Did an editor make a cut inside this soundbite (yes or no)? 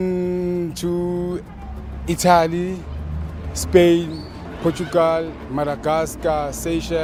no